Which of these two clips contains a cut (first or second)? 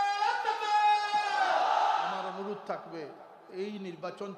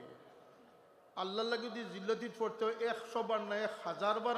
first